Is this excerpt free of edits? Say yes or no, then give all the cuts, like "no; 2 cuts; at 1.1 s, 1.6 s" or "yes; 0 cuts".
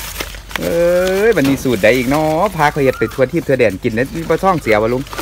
yes; 0 cuts